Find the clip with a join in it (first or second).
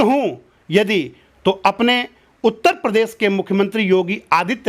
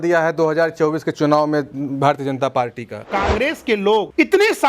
second